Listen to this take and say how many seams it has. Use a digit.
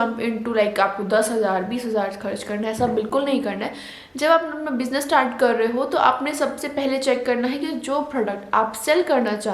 0